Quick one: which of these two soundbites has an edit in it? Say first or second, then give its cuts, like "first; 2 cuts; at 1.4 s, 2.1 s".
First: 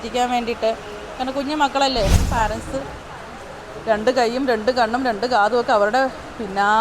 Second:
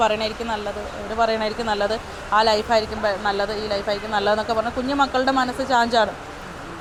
first; 1 cut; at 2.2 s